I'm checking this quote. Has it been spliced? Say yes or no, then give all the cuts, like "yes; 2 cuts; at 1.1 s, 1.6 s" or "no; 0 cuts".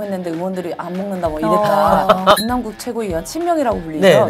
yes; 1 cut; at 2.4 s